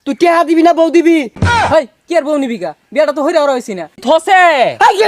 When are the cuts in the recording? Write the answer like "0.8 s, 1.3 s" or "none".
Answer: 1.4 s, 4.0 s